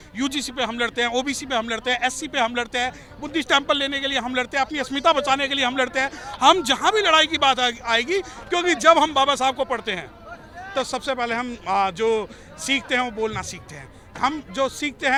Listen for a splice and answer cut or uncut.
uncut